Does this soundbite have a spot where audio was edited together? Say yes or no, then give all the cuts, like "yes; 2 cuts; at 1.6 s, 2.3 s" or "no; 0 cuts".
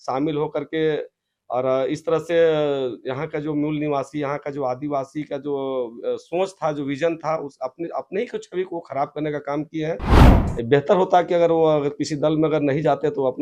no; 0 cuts